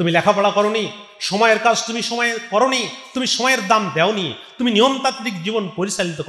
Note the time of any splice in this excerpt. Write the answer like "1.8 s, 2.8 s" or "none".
none